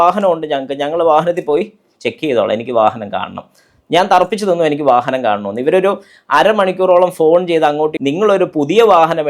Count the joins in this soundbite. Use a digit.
1